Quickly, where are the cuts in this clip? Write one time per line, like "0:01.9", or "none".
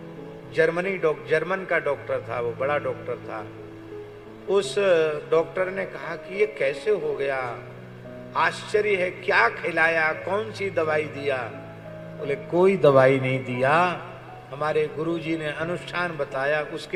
none